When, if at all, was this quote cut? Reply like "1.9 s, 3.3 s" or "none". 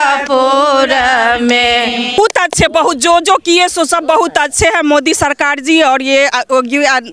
2.2 s